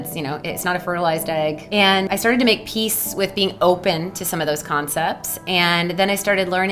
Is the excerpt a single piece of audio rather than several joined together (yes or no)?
no